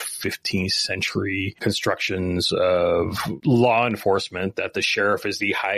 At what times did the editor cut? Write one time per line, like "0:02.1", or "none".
0:01.5
0:03.3

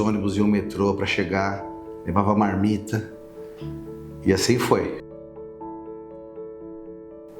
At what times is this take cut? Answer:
none

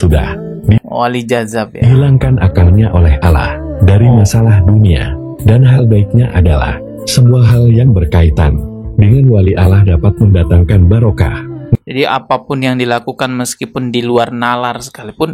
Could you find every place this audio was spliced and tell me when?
0:11.7

